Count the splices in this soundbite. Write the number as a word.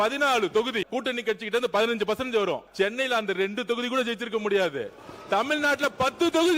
two